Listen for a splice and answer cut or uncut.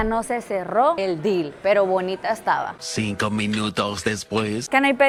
uncut